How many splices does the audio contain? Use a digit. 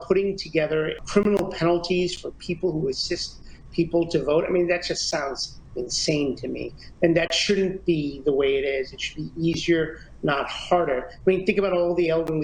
1